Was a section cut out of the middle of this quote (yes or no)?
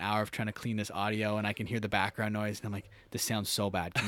no